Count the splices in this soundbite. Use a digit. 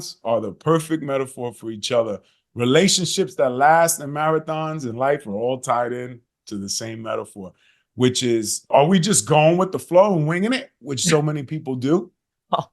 1